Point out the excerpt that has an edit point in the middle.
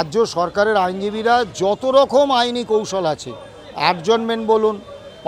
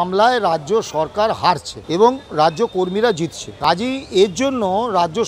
second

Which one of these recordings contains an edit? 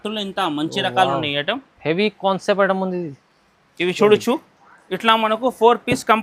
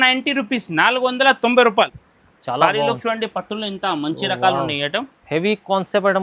second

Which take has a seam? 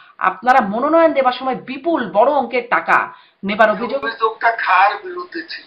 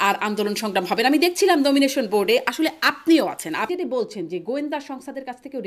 second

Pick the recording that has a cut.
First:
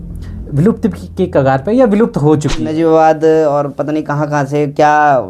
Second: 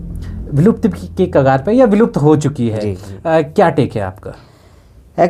first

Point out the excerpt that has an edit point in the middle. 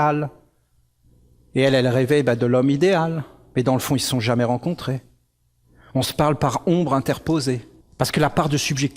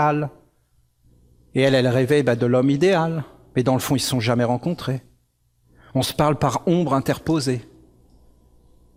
first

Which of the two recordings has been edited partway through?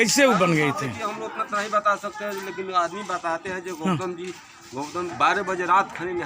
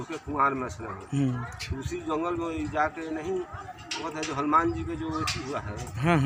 first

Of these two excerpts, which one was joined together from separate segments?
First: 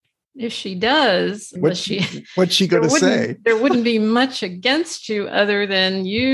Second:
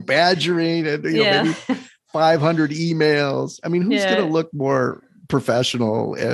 first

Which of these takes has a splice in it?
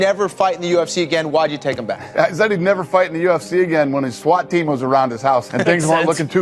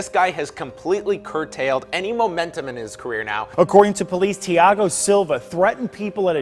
second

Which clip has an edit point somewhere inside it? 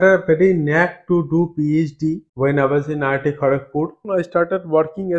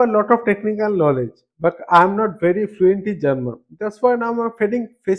first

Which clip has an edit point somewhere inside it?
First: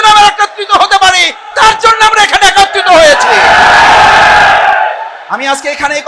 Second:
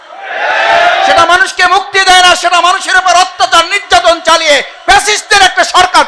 first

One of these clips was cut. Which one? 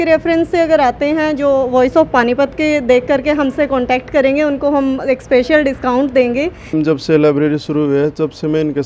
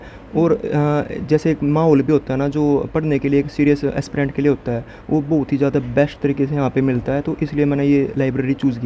first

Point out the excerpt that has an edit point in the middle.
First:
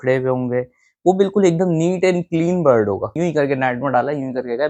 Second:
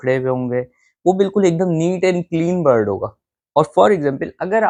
first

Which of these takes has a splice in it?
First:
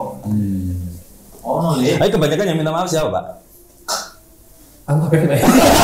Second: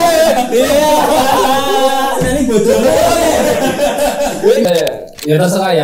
second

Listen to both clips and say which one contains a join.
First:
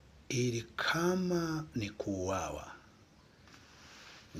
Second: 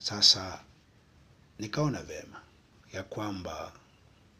second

